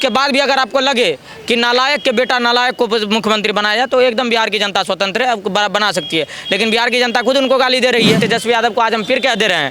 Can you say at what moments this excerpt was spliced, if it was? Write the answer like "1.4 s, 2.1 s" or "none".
8.2 s